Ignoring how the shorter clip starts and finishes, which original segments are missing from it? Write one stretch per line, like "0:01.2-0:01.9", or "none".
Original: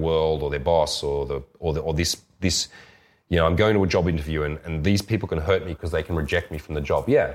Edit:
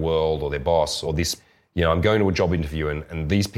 0:01.0-0:02.6